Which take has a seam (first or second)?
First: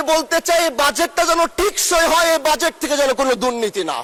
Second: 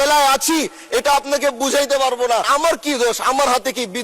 second